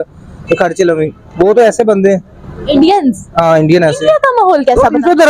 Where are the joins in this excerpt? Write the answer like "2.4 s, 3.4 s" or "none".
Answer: 3.7 s

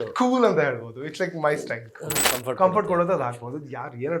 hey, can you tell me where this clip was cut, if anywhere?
2.3 s

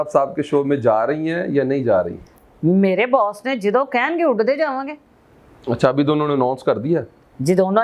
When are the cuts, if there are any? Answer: none

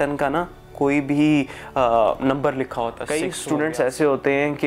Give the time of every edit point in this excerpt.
3.0 s

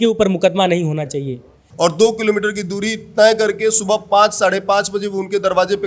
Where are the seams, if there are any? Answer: 1.6 s

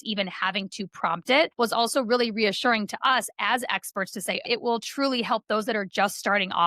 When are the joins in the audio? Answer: 1.5 s, 4.4 s

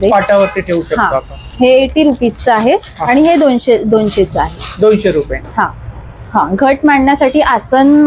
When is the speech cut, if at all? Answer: none

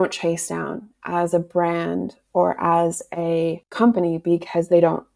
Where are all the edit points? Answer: 3.6 s

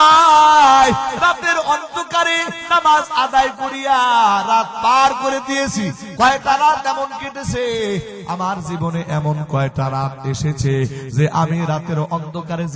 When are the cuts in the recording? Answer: 2.6 s

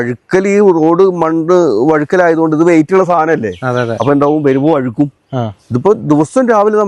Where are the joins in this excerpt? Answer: none

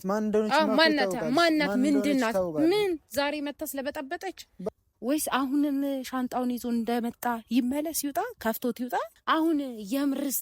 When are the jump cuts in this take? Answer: 4.7 s, 9.1 s

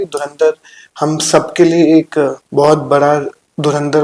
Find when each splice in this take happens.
2.4 s

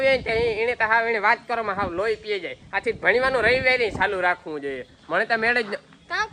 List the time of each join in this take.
none

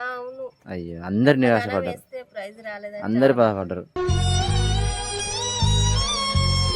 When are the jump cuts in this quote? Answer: none

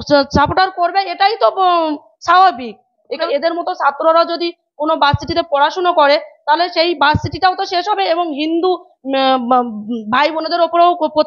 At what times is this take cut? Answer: 3.2 s

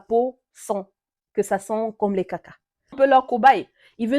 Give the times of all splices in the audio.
3.0 s

